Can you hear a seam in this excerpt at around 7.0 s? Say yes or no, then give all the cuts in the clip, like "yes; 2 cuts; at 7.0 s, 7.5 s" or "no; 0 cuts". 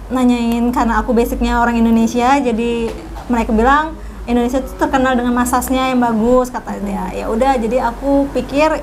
no; 0 cuts